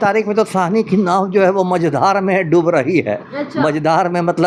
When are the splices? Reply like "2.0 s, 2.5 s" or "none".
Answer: none